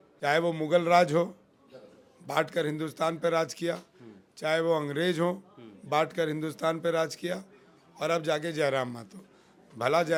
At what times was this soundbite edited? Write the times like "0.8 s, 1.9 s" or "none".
none

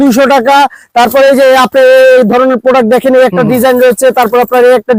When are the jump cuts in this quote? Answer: none

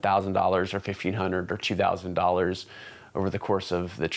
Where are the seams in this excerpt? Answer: none

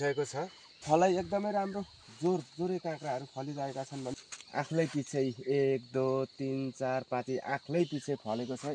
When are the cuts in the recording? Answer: 0.8 s, 4.1 s

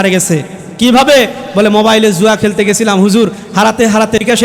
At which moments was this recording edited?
none

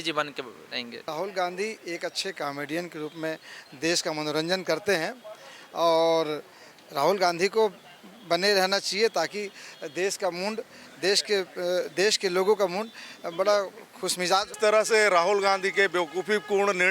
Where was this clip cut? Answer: 1.1 s, 14.5 s

